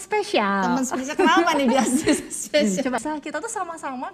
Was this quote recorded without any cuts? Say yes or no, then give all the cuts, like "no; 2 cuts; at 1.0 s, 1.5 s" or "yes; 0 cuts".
no; 1 cut; at 3.0 s